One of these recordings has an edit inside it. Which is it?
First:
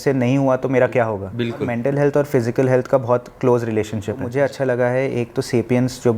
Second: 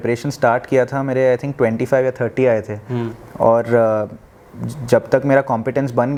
first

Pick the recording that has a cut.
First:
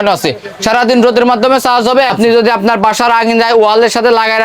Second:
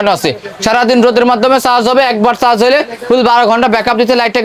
first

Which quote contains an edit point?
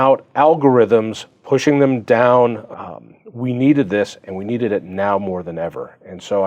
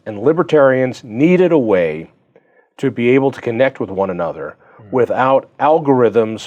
first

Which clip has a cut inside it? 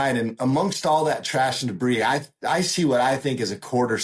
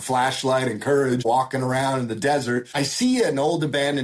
second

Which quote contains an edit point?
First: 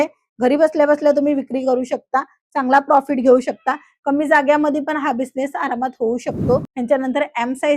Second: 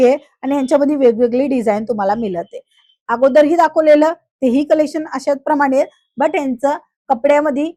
first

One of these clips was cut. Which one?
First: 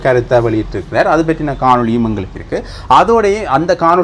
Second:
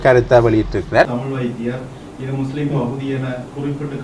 second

